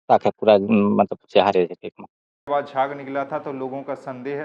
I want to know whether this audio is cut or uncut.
cut